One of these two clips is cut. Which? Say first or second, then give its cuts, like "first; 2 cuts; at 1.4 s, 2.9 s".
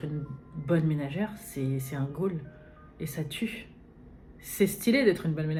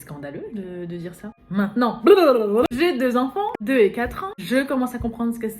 second; 4 cuts; at 1.4 s, 2.7 s, 3.6 s, 4.3 s